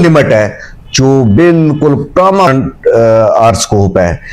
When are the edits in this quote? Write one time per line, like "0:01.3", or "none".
none